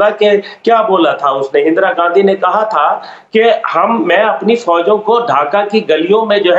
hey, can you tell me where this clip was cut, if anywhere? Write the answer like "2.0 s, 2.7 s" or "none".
none